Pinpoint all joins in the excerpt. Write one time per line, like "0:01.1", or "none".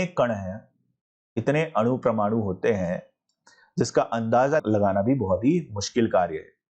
0:04.6

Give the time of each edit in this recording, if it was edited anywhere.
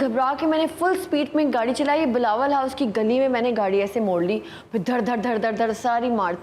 none

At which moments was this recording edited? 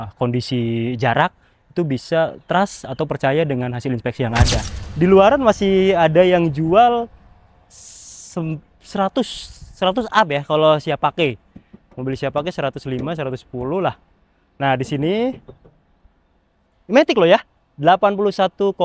0:04.8

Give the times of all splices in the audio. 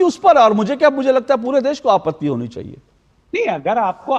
none

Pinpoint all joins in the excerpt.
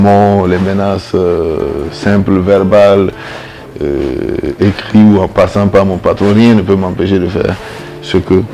none

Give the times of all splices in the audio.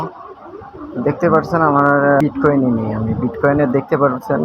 0:02.2

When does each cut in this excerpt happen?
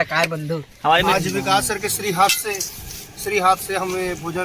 0:01.0

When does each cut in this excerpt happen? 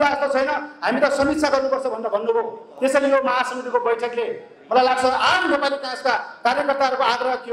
none

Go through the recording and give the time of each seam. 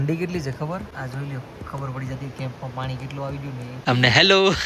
0:00.9
0:03.7

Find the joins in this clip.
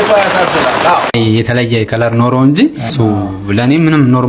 0:01.1

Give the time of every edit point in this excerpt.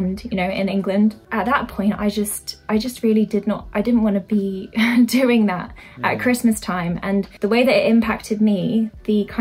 0:01.2
0:02.5
0:07.3

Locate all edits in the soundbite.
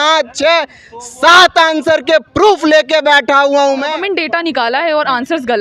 0:03.9

